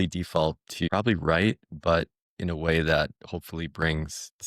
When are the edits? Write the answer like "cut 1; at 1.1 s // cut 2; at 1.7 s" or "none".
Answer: cut 1; at 0.8 s // cut 2; at 2.2 s